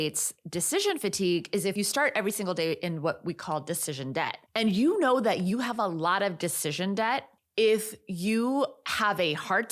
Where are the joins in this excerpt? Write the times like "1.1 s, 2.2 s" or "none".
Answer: 4.4 s, 7.4 s